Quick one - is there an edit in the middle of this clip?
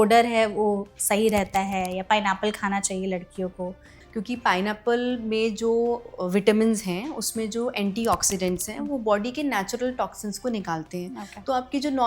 yes; 1 cut; at 3.9 s

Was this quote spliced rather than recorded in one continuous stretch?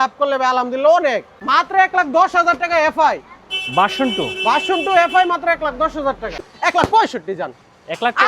yes; 2 cuts; at 1.3 s, 6.4 s

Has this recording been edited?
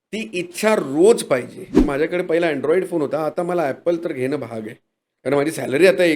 yes; 1 cut; at 1.8 s

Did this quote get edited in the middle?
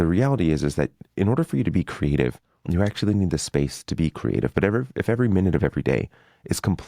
yes; 1 cut; at 2.5 s

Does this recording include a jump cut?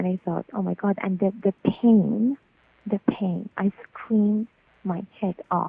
no; 0 cuts

